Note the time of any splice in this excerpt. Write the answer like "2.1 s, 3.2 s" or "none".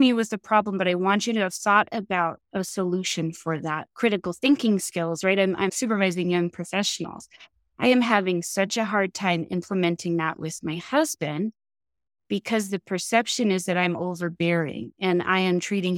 none